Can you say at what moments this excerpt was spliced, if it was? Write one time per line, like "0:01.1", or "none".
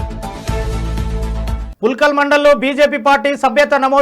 0:01.6